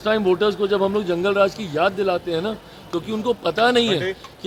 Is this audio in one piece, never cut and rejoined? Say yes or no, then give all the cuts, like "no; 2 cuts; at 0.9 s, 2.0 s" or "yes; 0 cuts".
yes; 0 cuts